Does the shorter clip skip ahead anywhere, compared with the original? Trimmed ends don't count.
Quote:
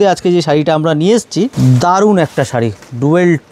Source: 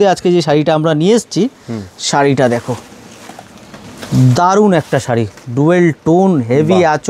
yes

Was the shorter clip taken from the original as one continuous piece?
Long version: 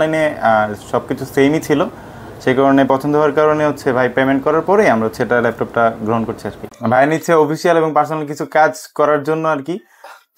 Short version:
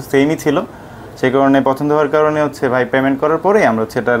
yes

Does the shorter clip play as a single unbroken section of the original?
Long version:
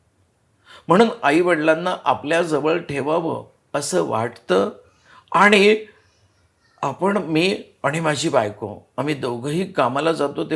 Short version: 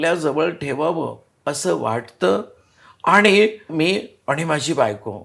no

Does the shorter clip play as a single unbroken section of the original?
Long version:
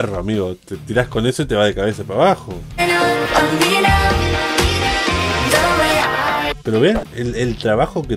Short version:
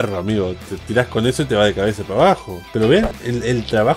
no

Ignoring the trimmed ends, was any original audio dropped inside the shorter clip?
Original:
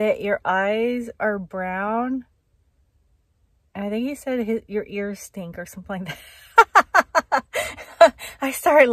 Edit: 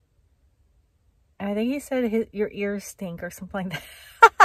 no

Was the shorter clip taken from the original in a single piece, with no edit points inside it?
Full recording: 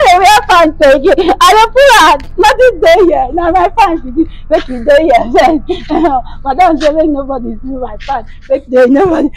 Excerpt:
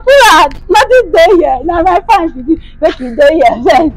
yes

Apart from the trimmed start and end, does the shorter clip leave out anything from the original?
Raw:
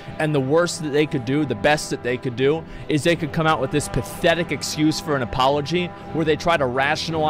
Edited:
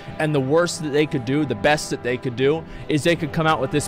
no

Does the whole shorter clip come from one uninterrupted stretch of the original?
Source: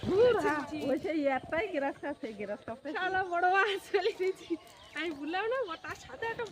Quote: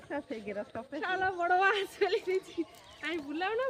yes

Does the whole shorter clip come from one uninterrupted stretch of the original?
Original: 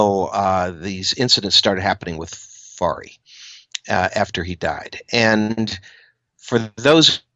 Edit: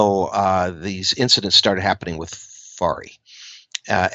yes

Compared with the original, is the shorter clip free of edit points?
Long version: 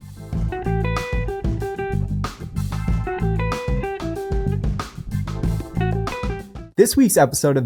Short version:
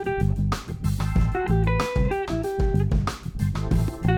yes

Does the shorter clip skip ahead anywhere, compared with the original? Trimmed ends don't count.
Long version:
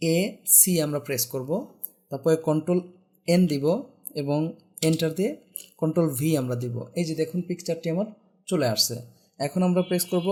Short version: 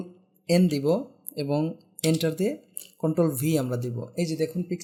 no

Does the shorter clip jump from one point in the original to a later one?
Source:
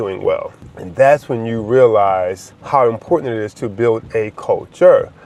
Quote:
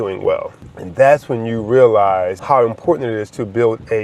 yes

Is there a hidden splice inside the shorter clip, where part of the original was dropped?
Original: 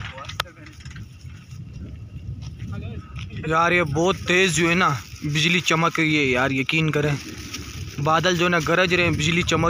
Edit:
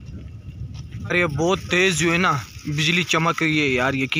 yes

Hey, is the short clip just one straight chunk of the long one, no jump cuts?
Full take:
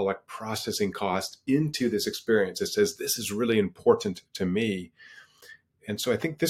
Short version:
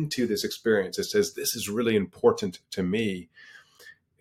yes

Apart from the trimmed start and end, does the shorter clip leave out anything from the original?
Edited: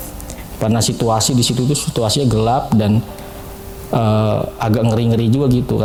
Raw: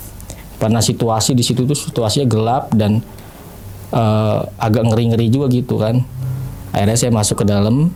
no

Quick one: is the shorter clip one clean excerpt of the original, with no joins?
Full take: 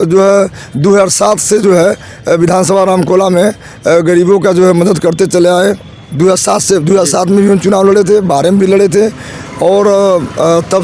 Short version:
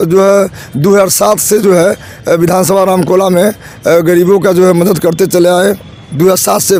yes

